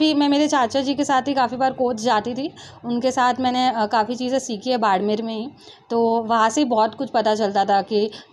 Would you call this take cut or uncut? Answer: uncut